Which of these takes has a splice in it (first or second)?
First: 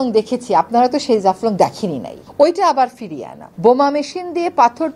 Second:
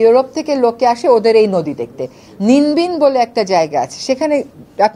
first